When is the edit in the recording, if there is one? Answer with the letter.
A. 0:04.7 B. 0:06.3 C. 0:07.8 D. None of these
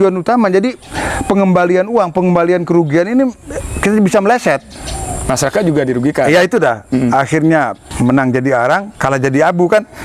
C